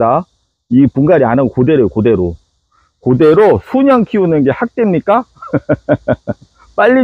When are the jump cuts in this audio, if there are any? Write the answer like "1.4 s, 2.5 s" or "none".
none